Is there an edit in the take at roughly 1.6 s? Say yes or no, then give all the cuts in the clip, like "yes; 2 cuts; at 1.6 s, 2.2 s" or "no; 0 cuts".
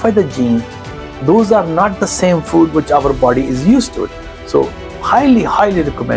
no; 0 cuts